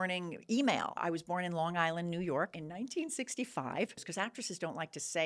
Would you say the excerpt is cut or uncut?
cut